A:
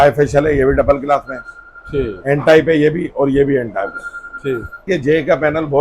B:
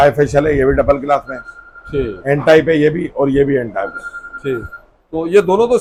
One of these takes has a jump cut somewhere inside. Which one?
A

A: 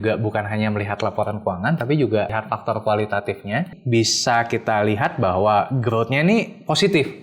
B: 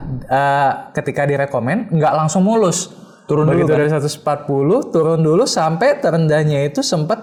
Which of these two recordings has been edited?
A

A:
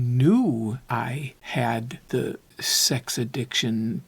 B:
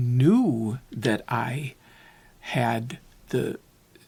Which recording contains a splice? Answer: A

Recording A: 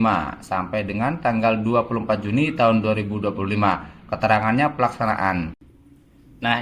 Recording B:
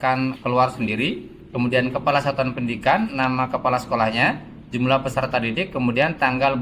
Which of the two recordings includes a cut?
A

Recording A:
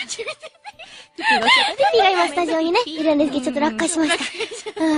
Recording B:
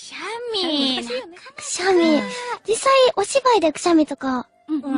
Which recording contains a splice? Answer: B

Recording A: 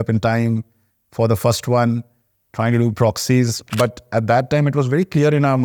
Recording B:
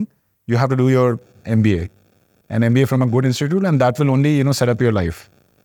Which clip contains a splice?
A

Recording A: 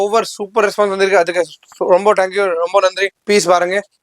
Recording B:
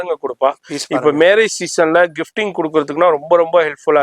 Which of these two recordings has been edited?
A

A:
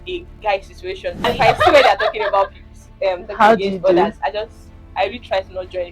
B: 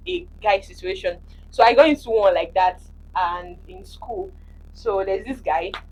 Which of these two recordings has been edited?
A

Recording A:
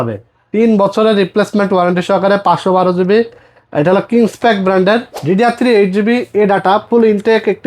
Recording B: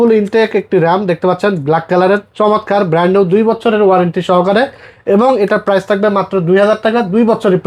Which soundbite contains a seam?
A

